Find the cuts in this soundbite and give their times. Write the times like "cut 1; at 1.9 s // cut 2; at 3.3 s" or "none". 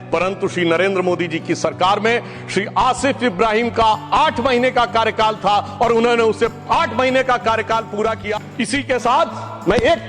cut 1; at 8.3 s